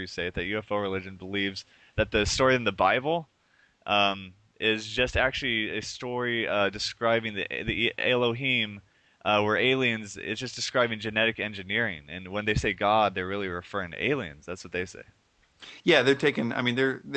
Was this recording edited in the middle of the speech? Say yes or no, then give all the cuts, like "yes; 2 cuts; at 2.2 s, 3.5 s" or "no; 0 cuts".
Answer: yes; 1 cut; at 13.6 s